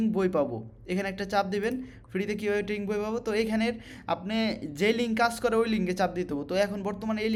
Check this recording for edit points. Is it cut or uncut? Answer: uncut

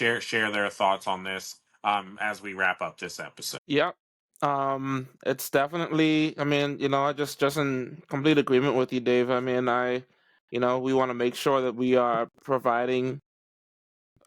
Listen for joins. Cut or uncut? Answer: cut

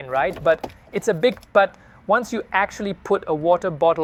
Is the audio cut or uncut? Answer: uncut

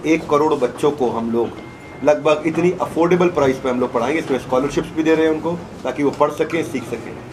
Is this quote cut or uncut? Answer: uncut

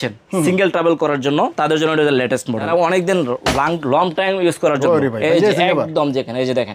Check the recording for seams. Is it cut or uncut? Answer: cut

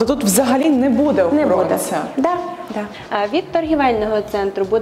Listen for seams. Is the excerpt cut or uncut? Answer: cut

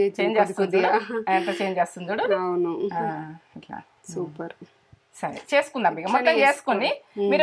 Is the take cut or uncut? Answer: uncut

